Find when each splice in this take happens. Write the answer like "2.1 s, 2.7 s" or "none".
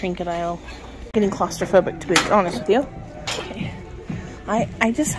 1.0 s, 3.4 s